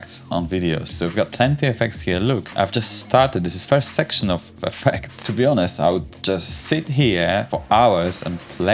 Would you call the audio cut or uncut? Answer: cut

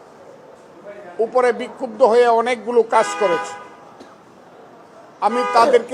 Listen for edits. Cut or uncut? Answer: uncut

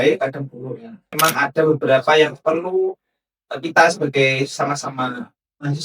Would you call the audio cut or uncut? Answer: cut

